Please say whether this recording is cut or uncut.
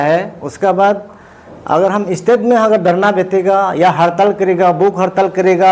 uncut